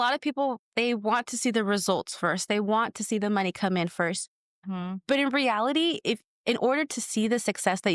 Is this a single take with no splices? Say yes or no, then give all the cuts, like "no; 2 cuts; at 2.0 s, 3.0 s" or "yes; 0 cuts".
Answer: no; 1 cut; at 6.3 s